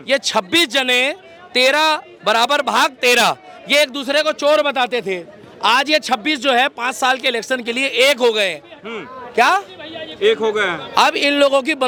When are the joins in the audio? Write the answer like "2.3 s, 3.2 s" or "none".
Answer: none